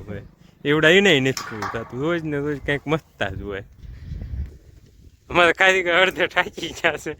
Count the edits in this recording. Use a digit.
1